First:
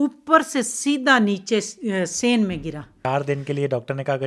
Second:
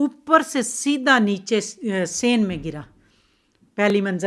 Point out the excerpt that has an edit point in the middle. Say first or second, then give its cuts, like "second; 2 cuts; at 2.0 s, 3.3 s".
first; 1 cut; at 3.1 s